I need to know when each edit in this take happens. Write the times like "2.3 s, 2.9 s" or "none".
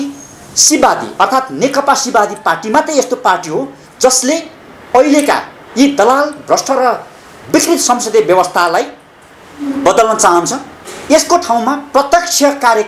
none